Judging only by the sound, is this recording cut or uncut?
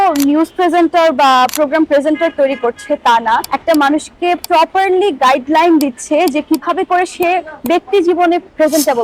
uncut